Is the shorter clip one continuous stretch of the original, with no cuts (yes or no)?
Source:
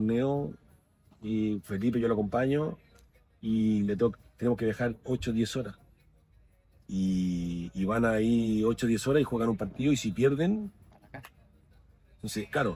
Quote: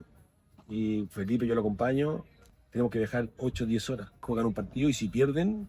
no